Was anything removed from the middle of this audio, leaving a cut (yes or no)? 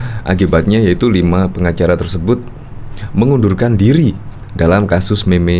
no